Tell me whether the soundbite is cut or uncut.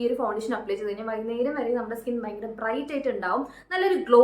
uncut